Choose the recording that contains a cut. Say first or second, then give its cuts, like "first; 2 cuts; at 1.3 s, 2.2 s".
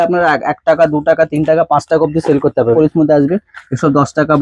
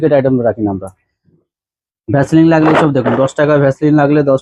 first; 1 cut; at 2.7 s